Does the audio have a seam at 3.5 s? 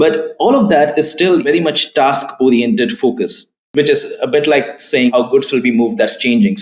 no; 2 cuts; at 1.4 s, 5.1 s

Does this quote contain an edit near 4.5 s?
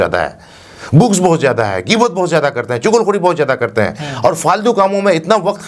no; 0 cuts

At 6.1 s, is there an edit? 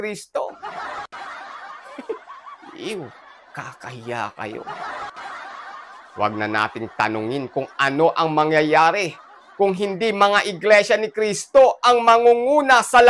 yes; 2 cuts; at 4.6 s, 6.1 s

